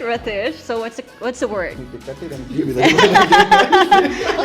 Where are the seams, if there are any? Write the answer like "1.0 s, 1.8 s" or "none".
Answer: 1.8 s